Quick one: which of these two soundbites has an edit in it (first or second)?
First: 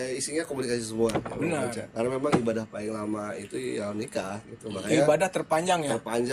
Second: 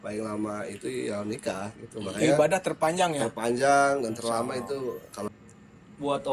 second